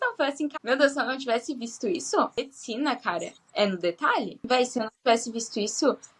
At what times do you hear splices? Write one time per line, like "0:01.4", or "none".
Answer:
0:02.3
0:04.5